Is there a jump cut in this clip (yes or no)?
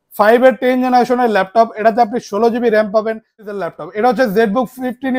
yes